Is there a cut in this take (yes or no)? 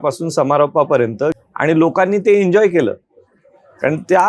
yes